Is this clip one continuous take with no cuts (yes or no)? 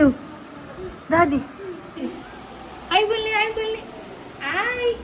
yes